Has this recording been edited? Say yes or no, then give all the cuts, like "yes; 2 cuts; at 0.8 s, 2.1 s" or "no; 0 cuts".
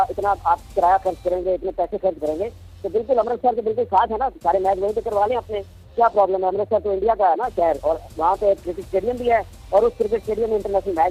no; 0 cuts